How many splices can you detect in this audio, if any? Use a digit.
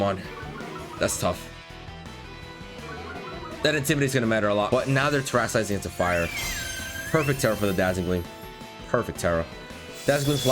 1